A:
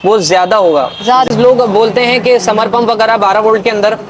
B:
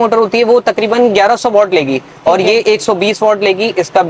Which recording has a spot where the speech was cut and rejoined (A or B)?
A